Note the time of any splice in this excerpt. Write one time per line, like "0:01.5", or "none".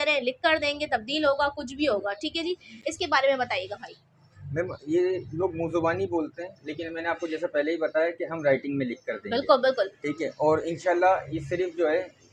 none